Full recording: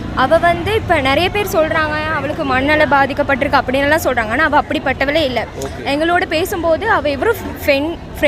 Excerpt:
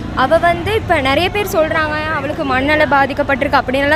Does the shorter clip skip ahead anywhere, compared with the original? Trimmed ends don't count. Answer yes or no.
no